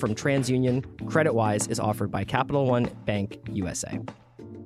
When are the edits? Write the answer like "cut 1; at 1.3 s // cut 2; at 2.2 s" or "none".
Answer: cut 1; at 3.7 s